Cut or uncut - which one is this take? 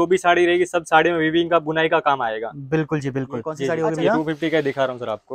cut